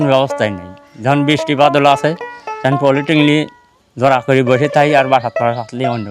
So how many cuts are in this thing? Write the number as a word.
zero